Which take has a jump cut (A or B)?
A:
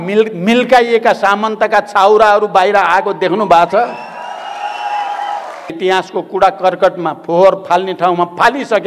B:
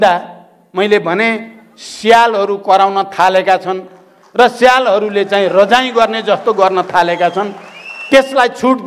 A